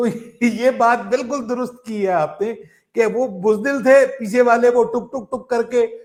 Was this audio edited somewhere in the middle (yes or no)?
no